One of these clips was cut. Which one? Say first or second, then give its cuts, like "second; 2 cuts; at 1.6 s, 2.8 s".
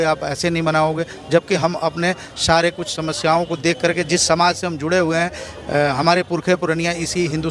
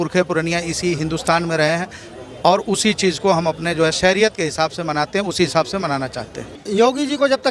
second; 1 cut; at 6.5 s